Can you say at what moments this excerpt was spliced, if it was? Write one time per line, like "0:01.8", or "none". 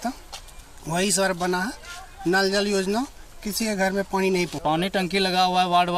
0:04.5